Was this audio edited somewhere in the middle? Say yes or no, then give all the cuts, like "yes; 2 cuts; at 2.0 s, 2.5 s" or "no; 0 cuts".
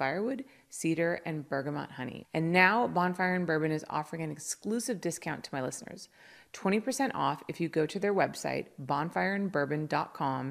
yes; 1 cut; at 2.2 s